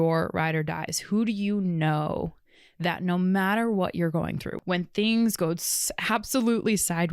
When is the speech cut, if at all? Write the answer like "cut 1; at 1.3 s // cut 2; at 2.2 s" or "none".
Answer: cut 1; at 4.5 s